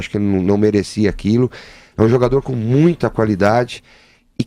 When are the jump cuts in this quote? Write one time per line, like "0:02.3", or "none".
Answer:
none